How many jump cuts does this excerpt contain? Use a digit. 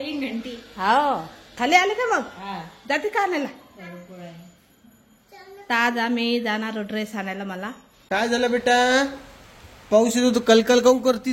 1